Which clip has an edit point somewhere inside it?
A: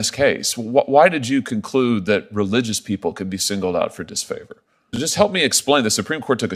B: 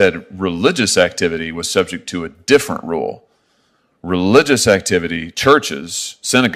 A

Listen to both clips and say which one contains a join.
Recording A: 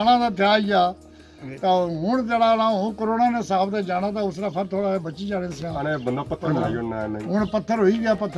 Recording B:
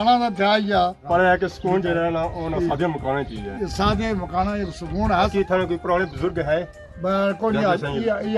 B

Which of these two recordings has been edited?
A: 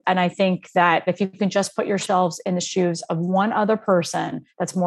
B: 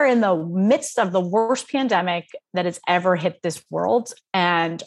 A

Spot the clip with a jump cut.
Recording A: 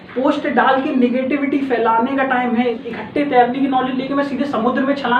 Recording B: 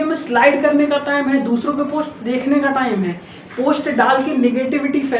A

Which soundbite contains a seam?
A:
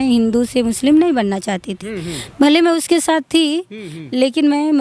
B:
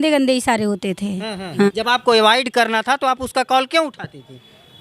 B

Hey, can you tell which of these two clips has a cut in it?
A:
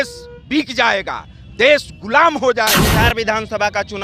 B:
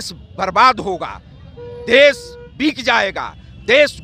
A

